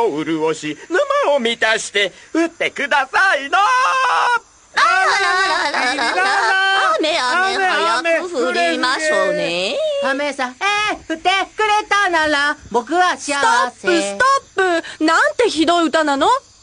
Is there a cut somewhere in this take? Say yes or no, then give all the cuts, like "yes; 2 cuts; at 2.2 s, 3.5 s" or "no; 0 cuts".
no; 0 cuts